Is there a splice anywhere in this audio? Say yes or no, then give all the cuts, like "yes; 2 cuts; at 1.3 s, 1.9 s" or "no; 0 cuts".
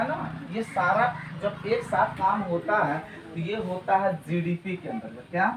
no; 0 cuts